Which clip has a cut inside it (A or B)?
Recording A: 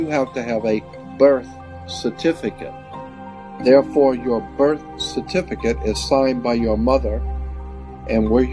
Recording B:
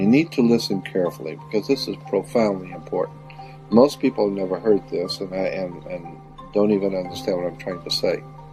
A